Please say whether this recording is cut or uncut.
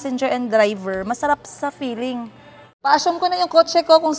cut